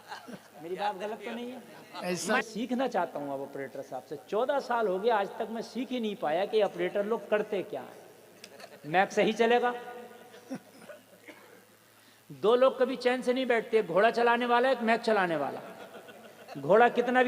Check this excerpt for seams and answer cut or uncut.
cut